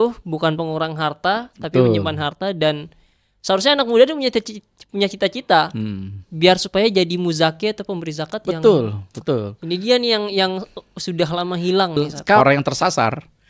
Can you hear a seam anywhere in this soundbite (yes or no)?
yes